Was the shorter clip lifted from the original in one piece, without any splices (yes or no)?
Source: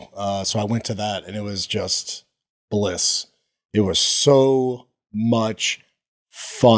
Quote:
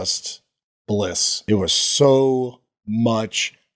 no